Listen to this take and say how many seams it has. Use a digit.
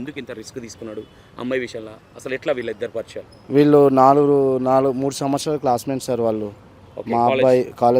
0